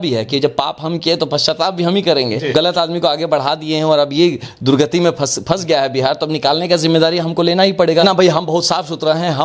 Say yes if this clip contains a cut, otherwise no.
yes